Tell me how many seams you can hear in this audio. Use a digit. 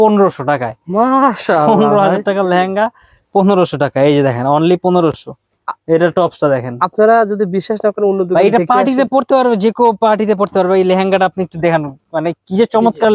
0